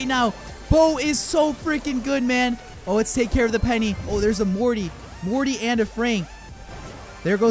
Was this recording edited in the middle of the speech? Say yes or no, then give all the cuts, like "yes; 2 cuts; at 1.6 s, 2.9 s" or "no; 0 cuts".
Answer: yes; 1 cut; at 4.0 s